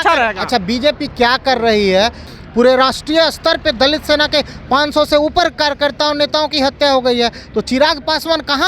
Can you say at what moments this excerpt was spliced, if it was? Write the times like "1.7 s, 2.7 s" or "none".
2.2 s